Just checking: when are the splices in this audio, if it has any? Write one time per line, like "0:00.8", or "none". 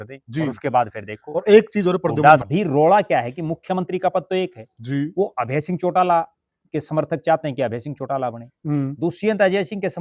0:02.4